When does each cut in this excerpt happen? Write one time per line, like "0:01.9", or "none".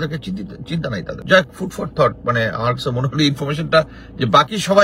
0:01.2